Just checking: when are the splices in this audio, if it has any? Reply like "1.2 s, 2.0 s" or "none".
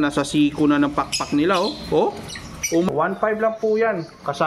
2.9 s